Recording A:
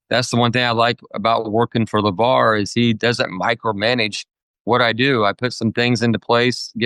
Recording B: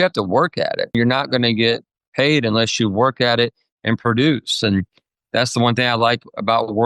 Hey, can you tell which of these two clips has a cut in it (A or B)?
B